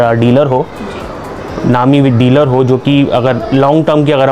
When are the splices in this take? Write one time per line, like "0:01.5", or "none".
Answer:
none